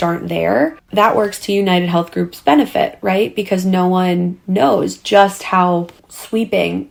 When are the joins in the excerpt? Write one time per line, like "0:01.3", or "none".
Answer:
none